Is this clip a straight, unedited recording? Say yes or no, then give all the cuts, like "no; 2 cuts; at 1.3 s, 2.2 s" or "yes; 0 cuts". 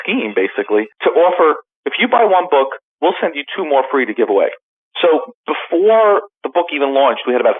no; 2 cuts; at 0.9 s, 6.4 s